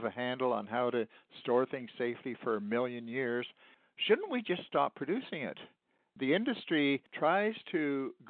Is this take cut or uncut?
cut